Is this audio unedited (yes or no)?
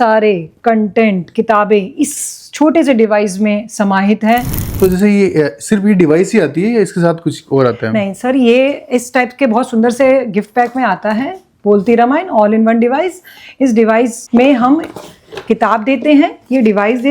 no